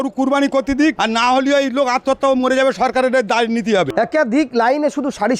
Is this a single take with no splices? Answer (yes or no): no